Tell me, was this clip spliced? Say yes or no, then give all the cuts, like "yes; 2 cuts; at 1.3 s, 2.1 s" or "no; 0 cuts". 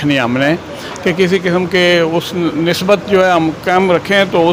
no; 0 cuts